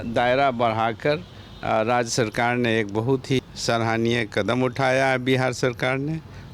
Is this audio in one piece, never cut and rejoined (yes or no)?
no